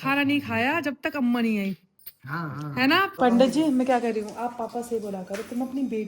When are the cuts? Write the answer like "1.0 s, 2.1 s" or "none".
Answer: 3.1 s

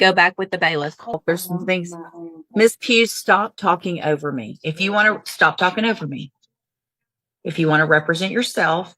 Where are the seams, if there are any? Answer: 1.1 s

